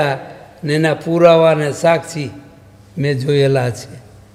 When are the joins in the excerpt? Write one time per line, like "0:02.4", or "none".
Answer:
none